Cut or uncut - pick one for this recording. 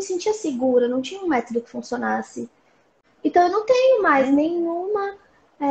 cut